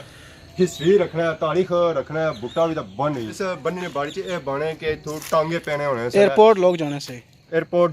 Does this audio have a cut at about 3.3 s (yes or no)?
yes